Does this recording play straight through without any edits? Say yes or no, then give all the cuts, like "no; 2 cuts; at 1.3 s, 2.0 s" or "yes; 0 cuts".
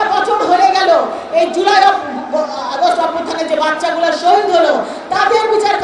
yes; 0 cuts